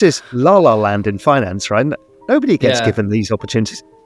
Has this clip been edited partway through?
no; 0 cuts

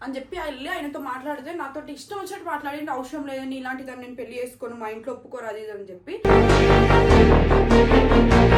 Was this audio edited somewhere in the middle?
no; 0 cuts

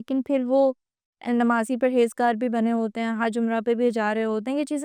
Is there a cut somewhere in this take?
no; 0 cuts

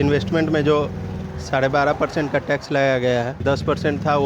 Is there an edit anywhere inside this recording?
yes; 1 cut; at 3.3 s

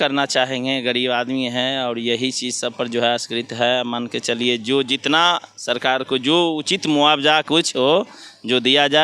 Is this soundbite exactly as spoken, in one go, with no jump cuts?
yes; 0 cuts

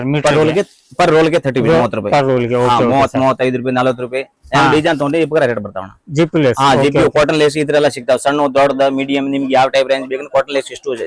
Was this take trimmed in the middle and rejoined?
yes; 1 cut; at 6.0 s

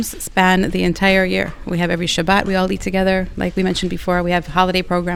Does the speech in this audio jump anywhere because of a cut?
no; 0 cuts

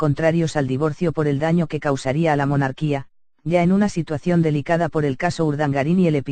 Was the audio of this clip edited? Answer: yes; 1 cut; at 1.5 s

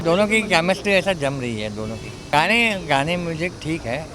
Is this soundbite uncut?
no; 1 cut; at 2.2 s

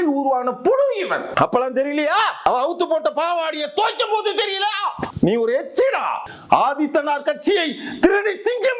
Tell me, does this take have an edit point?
yes; 4 cuts; at 1.3 s, 2.5 s, 5.1 s, 6.3 s

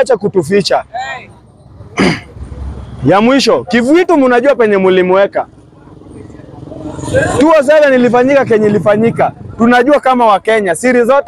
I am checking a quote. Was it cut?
no; 0 cuts

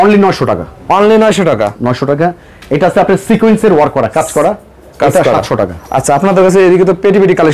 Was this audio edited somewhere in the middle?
no; 0 cuts

